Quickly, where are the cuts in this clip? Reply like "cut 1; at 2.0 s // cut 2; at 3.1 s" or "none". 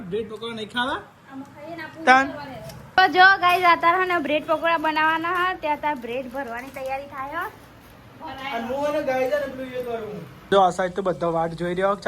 cut 1; at 2.9 s // cut 2; at 10.5 s